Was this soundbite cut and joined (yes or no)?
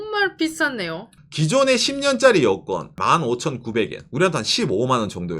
yes